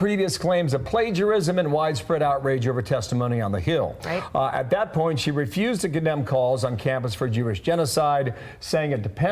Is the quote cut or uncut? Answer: uncut